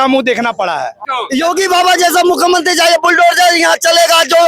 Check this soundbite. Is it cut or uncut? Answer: cut